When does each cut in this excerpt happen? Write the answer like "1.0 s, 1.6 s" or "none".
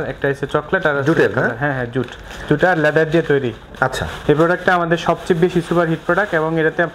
3.6 s